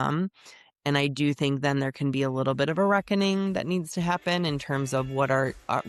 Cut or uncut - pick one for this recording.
uncut